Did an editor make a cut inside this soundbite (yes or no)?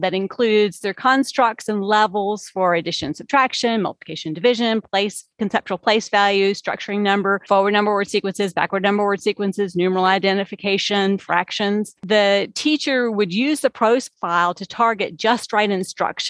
no